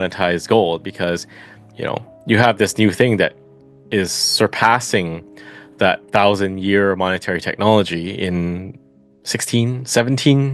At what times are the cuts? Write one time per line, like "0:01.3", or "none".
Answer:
none